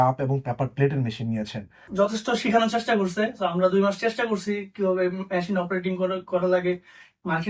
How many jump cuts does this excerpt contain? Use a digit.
1